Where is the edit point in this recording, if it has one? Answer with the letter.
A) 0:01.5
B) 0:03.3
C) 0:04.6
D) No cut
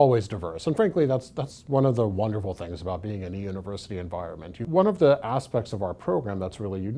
C